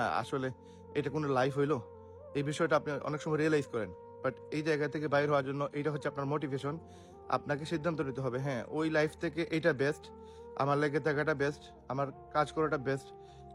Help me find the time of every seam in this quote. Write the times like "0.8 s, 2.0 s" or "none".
none

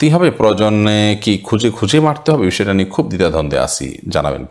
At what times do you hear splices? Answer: none

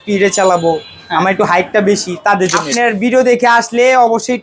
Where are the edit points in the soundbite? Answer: 2.6 s

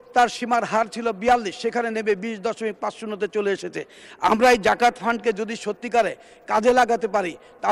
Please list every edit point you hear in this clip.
none

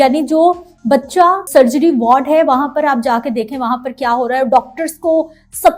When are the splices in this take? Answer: 1.5 s

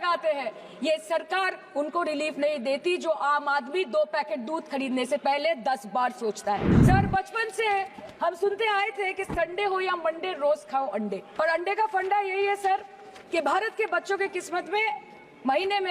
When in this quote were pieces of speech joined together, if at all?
6.7 s, 11.2 s

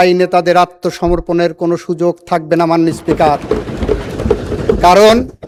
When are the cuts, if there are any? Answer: none

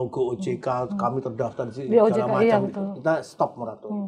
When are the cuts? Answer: none

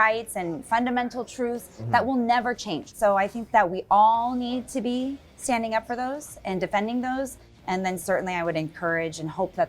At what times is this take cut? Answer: 2.9 s

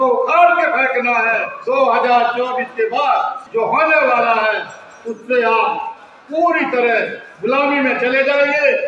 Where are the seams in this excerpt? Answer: 1.5 s, 3.4 s

